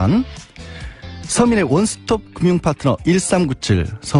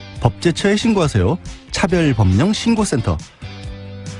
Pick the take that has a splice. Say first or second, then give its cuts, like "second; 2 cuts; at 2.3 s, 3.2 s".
second; 1 cut; at 2.1 s